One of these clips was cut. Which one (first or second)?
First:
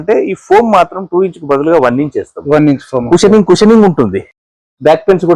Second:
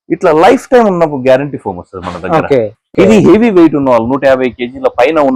second